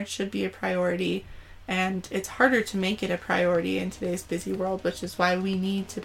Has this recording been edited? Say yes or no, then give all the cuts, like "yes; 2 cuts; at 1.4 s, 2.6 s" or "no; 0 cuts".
no; 0 cuts